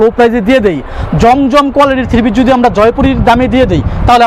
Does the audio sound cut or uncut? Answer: uncut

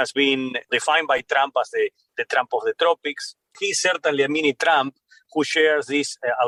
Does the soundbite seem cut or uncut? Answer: uncut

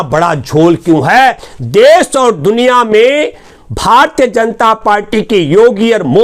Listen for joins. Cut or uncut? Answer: cut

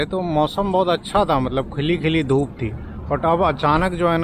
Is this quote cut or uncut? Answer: uncut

